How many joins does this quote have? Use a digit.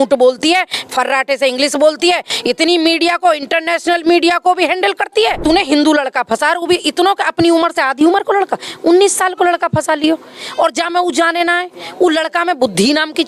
1